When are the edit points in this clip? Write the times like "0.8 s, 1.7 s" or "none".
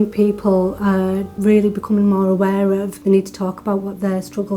1.3 s, 2.9 s